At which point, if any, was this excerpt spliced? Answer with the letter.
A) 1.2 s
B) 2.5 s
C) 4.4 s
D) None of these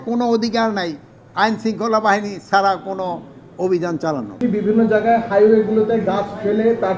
C